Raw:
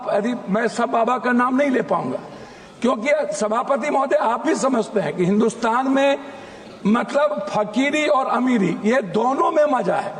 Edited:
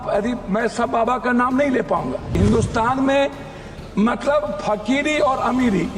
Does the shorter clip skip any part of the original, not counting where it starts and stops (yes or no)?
yes